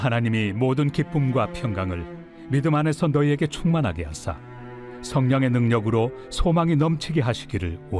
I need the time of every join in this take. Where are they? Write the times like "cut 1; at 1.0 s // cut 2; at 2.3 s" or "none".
none

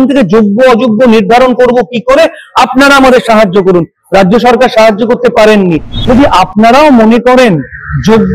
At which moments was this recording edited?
cut 1; at 5.9 s

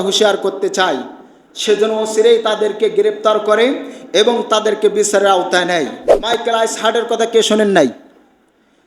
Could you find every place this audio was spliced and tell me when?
cut 1; at 6.1 s

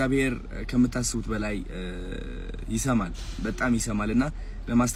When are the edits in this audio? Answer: none

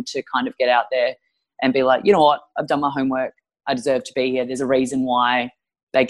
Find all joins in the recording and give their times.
none

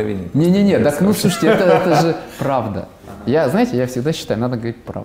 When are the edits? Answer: none

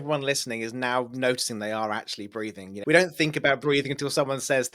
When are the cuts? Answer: cut 1; at 2.9 s

